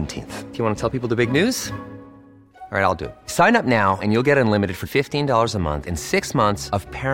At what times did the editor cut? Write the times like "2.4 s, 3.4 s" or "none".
none